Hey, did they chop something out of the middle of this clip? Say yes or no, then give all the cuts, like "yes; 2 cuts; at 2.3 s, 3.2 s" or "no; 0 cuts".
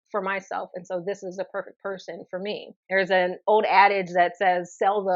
yes; 1 cut; at 2.7 s